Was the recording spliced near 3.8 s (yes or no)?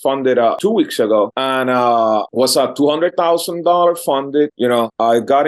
no